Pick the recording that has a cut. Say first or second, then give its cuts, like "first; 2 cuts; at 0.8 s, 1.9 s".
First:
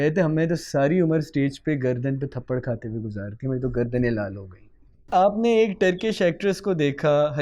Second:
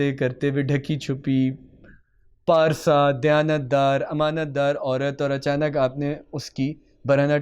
first; 1 cut; at 5.1 s